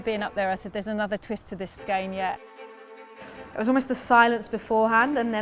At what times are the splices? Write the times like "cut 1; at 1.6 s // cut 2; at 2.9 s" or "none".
cut 1; at 1.8 s // cut 2; at 3.0 s